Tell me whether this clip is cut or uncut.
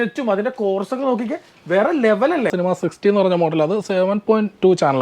cut